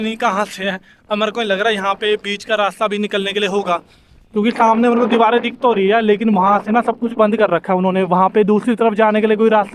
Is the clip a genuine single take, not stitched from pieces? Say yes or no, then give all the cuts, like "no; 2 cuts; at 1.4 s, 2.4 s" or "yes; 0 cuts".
yes; 0 cuts